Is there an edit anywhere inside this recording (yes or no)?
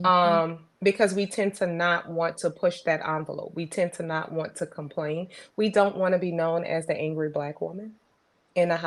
no